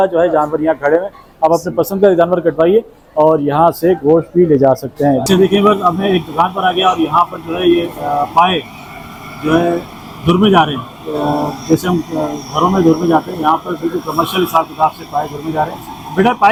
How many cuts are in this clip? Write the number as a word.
zero